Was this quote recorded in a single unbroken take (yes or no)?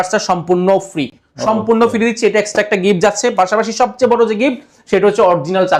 yes